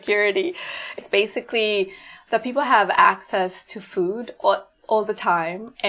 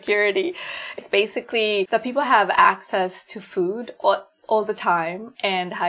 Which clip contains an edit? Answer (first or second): second